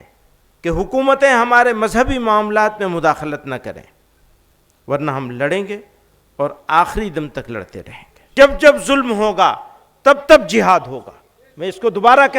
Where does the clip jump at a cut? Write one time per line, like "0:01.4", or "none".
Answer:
0:08.3